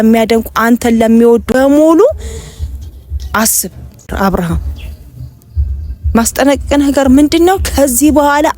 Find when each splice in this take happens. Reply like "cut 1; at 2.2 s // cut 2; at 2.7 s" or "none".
cut 1; at 1.5 s // cut 2; at 4.1 s